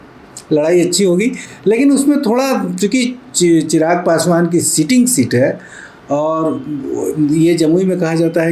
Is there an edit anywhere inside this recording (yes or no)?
no